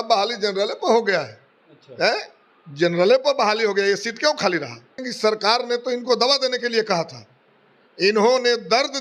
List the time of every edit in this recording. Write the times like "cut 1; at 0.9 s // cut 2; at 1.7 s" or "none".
cut 1; at 5.1 s